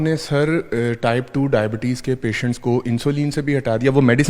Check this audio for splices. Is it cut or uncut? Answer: uncut